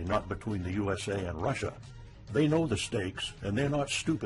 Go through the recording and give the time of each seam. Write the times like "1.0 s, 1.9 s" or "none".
none